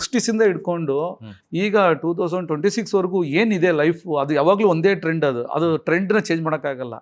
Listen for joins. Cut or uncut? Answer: uncut